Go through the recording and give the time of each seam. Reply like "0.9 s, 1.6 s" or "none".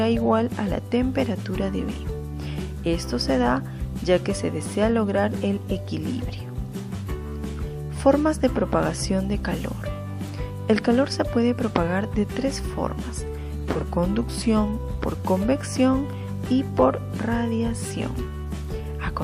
1.2 s